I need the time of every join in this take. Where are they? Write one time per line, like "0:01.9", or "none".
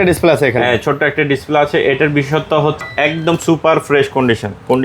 0:02.8